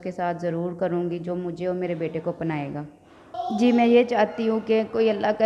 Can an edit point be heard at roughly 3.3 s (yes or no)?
yes